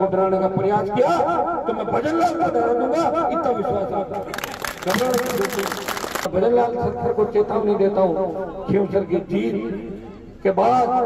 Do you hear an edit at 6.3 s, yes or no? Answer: yes